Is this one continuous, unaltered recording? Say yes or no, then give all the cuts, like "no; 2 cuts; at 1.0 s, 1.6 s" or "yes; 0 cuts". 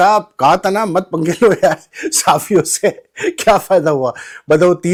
yes; 0 cuts